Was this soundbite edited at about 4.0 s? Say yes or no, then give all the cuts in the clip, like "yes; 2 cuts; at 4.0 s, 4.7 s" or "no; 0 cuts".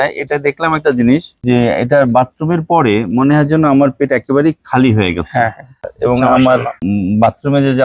no; 3 cuts; at 1.3 s, 5.7 s, 6.7 s